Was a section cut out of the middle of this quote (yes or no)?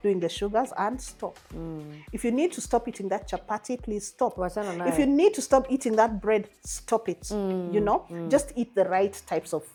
no